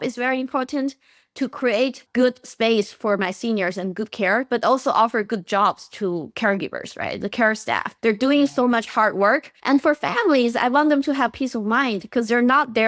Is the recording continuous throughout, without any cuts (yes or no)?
no